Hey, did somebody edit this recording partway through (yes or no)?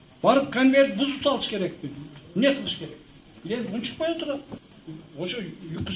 yes